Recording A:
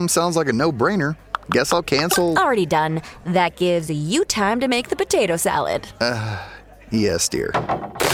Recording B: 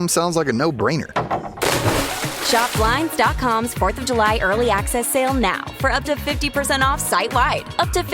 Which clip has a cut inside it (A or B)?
B